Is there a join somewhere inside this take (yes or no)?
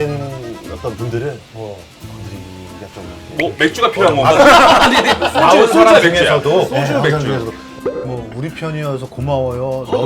yes